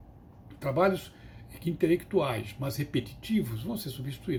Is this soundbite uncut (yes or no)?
yes